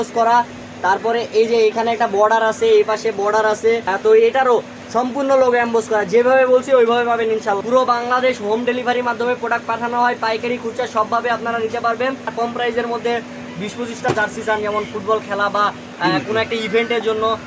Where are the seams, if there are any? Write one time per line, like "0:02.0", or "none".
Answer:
0:03.9
0:07.6
0:12.3